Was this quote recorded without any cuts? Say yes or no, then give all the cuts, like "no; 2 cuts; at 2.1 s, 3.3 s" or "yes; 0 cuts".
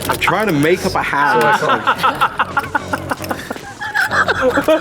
no; 1 cut; at 3.5 s